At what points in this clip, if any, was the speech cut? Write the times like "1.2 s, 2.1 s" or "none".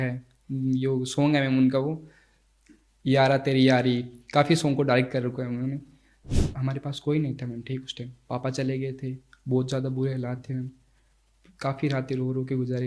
6.1 s